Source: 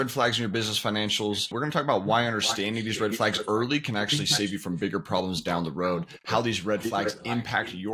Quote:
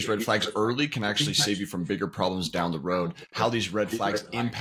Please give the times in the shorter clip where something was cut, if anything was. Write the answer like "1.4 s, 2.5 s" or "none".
none